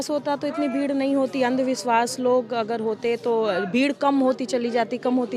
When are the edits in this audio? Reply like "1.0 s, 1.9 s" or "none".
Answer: none